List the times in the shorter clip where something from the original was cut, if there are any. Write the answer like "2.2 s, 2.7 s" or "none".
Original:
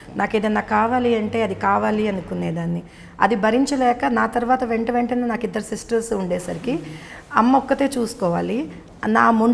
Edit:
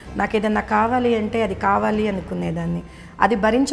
none